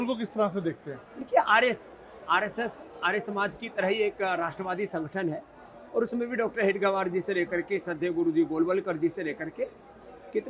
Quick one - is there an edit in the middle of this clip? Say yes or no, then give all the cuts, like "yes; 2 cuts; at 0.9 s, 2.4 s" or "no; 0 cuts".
no; 0 cuts